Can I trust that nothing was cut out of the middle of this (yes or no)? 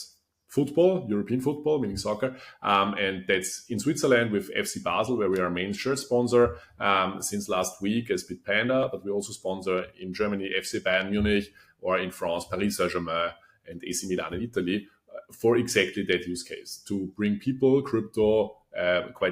yes